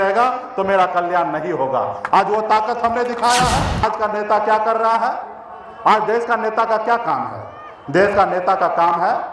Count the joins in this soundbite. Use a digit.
1